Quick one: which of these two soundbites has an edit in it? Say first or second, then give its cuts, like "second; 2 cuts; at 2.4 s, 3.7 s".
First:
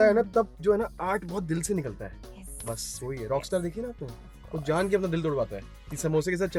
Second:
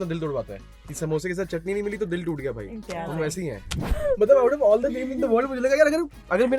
second; 1 cut; at 3.9 s